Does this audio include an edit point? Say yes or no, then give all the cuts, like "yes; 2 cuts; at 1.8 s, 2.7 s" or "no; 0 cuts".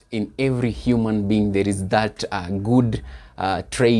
no; 0 cuts